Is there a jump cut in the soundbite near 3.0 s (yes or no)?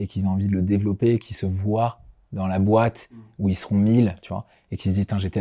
no